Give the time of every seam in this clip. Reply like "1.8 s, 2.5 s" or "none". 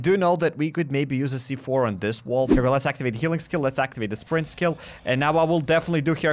2.5 s